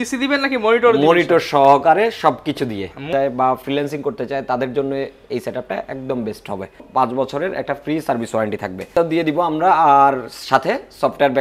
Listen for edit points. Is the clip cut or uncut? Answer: cut